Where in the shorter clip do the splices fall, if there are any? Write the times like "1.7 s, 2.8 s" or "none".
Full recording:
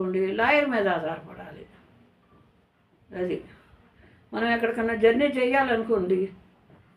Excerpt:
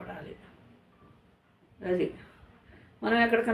none